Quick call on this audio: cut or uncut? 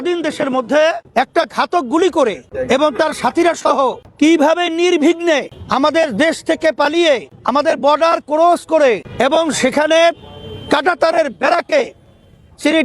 cut